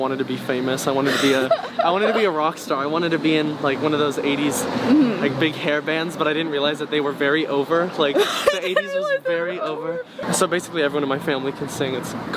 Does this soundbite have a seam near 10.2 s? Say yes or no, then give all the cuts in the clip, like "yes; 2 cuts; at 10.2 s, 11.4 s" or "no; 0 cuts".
yes; 1 cut; at 10.2 s